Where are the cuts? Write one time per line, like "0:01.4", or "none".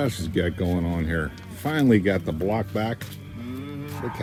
none